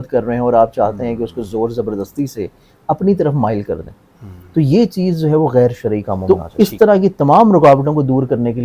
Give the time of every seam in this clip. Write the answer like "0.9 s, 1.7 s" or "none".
6.1 s